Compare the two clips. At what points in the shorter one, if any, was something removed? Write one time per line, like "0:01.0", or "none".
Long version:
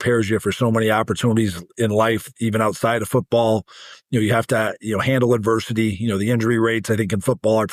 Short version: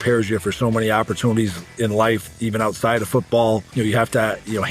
0:03.7